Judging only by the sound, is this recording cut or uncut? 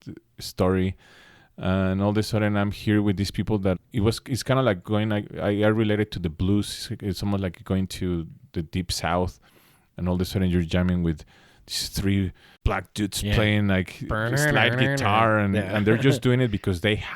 cut